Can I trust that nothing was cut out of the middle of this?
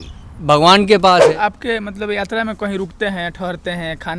no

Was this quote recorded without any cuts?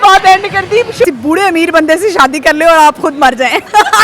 no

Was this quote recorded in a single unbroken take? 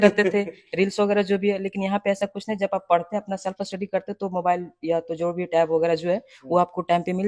yes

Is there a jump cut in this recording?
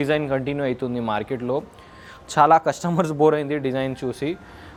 no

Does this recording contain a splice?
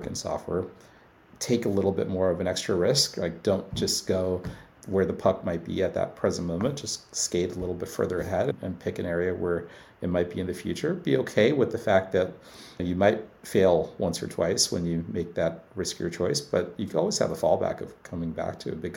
yes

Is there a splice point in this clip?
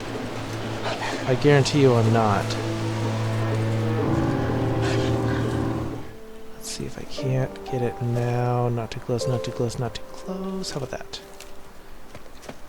yes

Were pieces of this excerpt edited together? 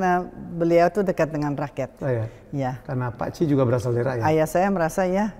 no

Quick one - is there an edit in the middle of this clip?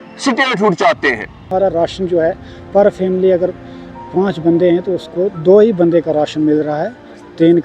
yes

